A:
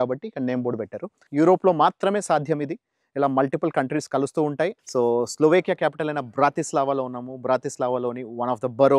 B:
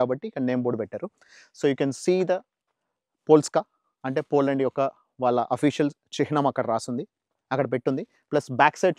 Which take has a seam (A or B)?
A